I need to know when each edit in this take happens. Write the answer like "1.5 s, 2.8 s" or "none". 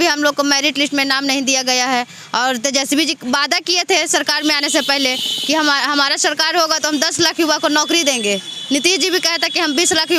none